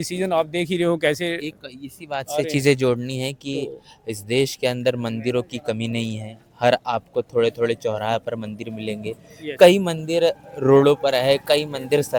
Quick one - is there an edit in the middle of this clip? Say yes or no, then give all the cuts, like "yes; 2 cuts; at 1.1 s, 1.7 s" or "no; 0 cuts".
no; 0 cuts